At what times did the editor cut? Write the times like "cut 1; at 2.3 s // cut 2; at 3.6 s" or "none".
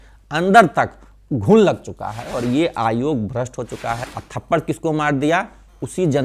cut 1; at 4.0 s